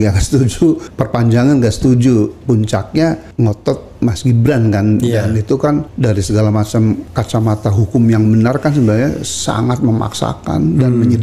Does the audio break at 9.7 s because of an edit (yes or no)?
no